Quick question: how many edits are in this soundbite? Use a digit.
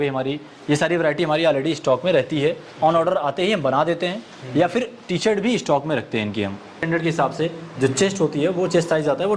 1